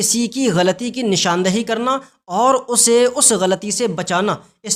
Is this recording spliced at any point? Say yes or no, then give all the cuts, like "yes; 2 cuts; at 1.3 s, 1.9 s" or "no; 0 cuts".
no; 0 cuts